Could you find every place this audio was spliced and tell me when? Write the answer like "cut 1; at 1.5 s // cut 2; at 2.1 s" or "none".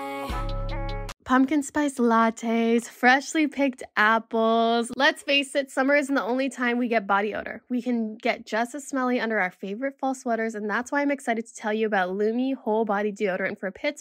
cut 1; at 1.1 s